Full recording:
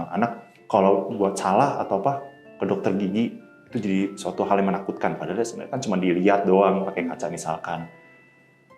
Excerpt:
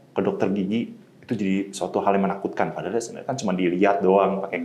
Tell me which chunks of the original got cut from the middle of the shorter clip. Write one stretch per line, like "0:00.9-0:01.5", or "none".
none

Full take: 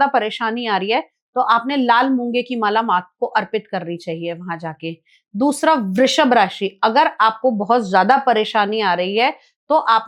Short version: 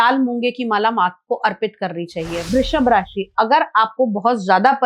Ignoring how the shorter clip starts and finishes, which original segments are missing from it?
0:04.4-0:05.9

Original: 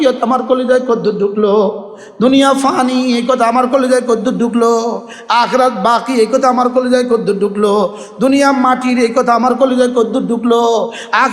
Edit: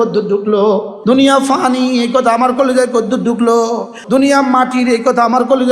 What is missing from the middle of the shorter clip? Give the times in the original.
0:01.8-0:02.1
0:05.1-0:08.0

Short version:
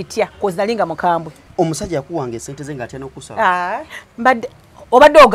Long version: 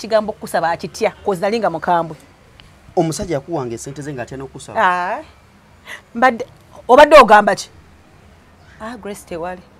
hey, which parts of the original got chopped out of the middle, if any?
0:02.2-0:02.8
0:05.4-0:06.0

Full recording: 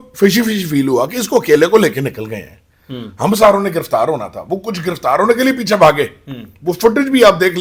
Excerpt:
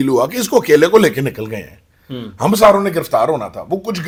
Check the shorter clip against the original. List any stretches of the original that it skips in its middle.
none

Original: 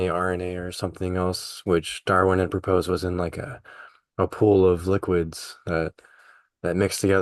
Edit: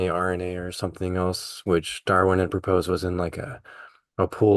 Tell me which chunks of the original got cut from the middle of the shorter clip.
none

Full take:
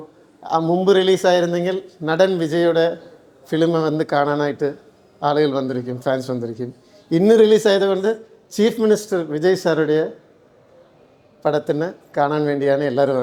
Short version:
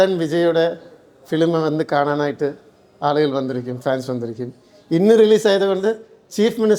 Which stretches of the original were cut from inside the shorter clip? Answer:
none

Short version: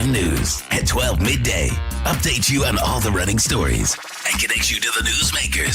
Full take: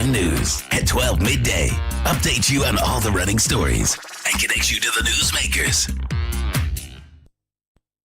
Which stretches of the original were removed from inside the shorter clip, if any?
none

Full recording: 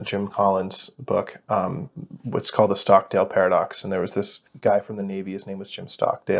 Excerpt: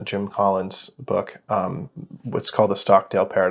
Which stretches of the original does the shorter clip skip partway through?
none

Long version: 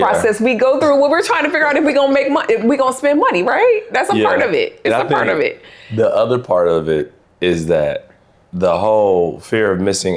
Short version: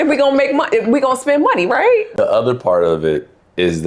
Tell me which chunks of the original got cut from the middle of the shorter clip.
0:03.9-0:06.0

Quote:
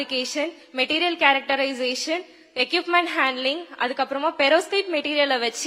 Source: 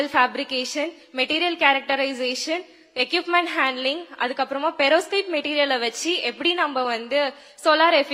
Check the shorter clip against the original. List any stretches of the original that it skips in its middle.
none

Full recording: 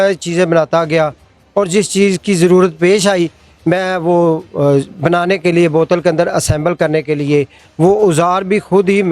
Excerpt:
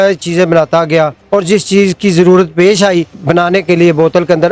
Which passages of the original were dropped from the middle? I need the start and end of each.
0:01.2-0:01.4
0:03.4-0:04.9

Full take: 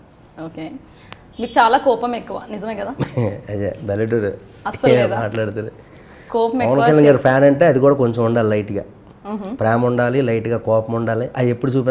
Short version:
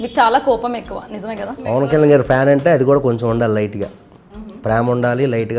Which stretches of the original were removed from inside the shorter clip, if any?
0:03.0-0:06.6

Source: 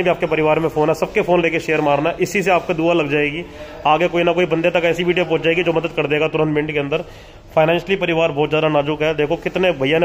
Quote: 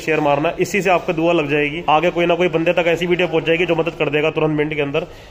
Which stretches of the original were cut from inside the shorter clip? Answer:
0:03.4-0:03.7

